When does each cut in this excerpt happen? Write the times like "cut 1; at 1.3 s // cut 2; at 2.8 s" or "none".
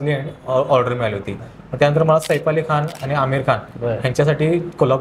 cut 1; at 1.5 s